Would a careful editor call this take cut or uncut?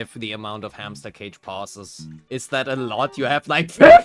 cut